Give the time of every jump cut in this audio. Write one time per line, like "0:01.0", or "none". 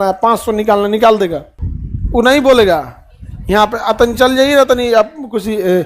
none